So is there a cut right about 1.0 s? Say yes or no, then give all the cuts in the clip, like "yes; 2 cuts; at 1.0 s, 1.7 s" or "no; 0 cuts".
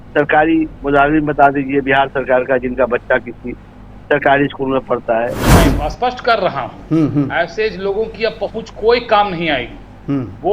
no; 1 cut; at 5.5 s